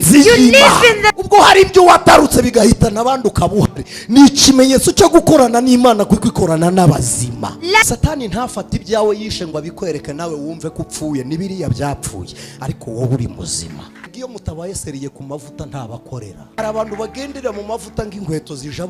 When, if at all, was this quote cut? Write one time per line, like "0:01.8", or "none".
0:01.1
0:07.8
0:14.1
0:16.4